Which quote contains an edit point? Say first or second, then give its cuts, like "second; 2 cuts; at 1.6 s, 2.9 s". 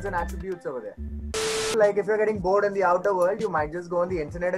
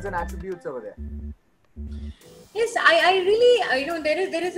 first; 1 cut; at 1.7 s